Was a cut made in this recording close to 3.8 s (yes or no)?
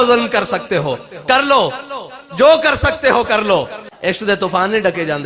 yes